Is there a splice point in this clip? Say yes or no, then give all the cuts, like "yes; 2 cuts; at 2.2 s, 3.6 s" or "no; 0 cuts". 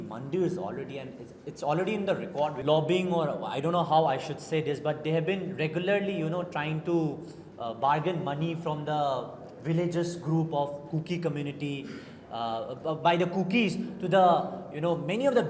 yes; 1 cut; at 2.6 s